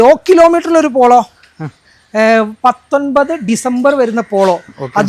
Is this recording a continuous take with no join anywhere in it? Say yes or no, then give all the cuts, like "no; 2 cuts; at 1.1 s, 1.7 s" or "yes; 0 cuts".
yes; 0 cuts